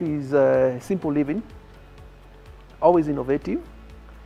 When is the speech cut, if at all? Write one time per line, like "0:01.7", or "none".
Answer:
none